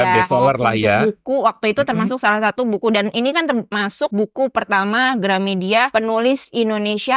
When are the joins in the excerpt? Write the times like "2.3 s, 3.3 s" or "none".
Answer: 3.9 s, 5.9 s

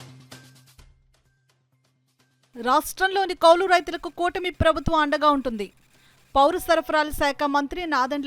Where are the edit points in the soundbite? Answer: 2.4 s

